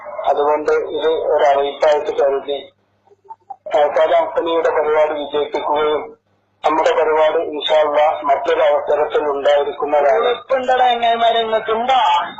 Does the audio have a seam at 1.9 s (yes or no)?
yes